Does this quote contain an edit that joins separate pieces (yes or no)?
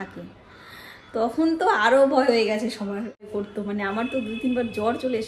yes